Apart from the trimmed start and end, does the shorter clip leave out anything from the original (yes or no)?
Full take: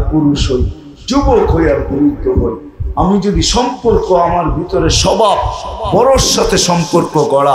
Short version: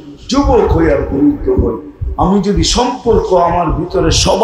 no